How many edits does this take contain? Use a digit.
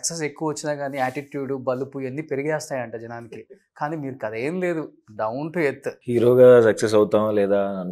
1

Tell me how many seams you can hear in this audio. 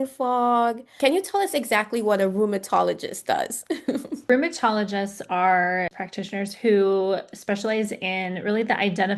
3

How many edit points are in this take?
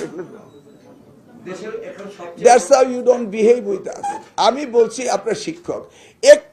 0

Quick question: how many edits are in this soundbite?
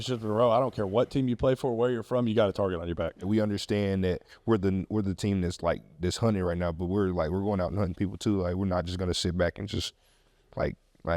1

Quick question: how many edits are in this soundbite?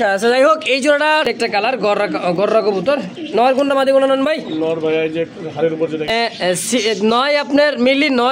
2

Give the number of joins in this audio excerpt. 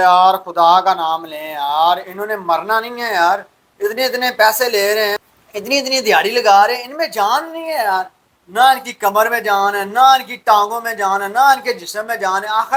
0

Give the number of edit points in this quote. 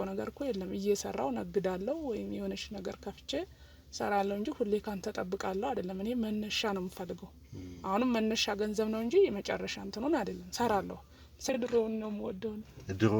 1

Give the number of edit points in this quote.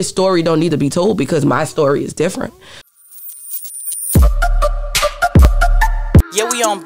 1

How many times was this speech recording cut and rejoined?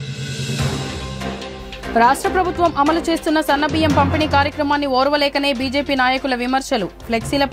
1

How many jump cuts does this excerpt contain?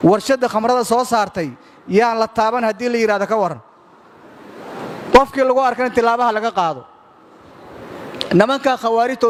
0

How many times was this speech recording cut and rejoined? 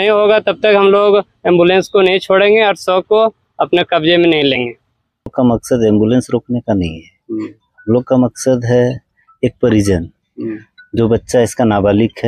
1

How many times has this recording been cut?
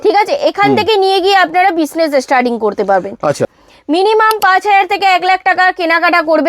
1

